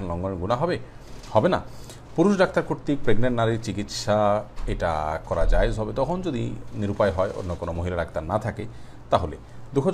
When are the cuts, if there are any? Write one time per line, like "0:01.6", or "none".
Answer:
none